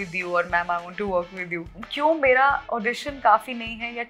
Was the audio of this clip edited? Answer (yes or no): yes